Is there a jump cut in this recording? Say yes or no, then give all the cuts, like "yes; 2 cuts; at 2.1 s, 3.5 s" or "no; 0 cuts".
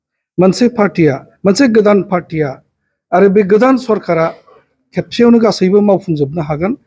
no; 0 cuts